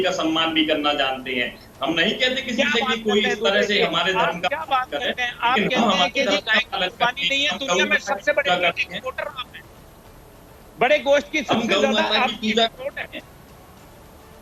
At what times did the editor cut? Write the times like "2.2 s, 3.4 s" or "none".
none

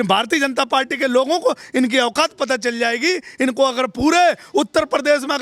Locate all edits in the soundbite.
none

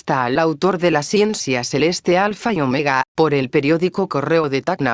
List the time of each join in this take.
3.1 s

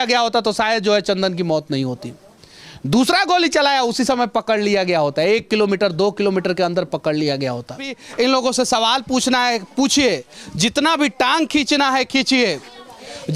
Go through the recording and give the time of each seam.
8.0 s

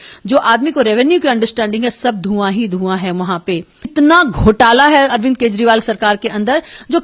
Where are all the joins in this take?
3.9 s

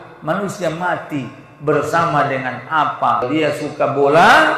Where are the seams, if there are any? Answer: 3.2 s

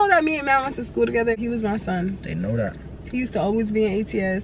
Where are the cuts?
1.4 s

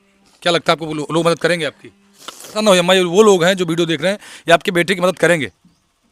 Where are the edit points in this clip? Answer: 2.4 s

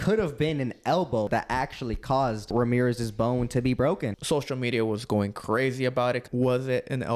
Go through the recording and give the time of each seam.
1.3 s, 2.5 s, 4.2 s, 6.3 s

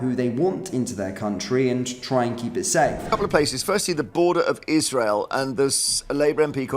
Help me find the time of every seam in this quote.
3.0 s

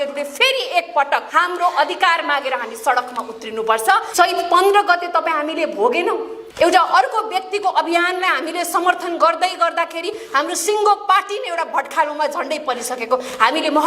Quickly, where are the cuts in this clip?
4.1 s

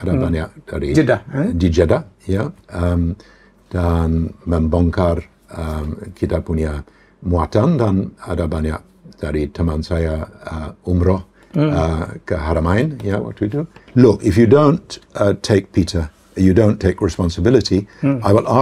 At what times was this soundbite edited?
13.7 s

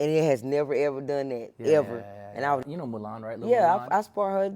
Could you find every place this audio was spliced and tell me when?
2.7 s

